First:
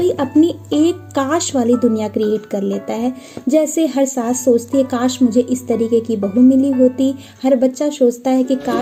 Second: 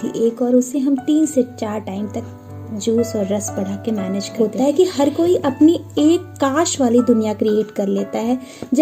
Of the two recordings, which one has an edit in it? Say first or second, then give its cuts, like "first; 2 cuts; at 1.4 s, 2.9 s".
second; 1 cut; at 4.3 s